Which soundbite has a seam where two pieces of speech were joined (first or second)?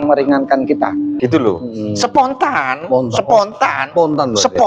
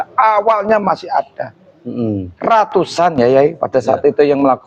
first